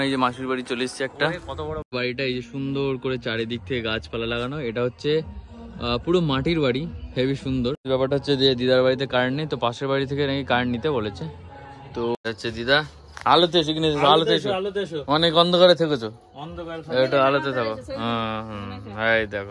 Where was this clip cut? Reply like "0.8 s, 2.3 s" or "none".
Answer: 1.8 s, 7.8 s, 12.2 s